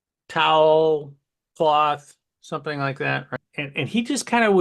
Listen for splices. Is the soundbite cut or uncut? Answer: cut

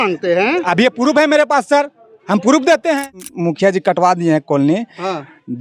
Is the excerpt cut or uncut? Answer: cut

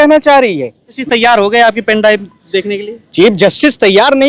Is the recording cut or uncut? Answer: cut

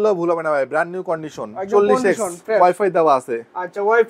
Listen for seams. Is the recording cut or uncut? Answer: uncut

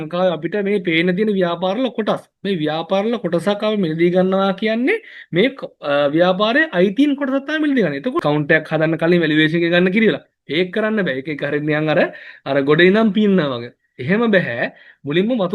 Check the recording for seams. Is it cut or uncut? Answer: cut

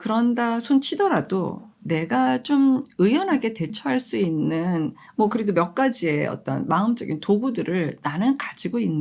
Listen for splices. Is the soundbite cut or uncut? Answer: uncut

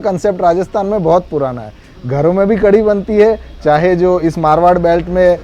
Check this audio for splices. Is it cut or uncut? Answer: uncut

